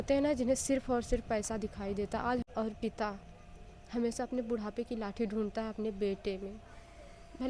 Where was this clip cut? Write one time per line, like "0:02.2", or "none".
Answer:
0:02.4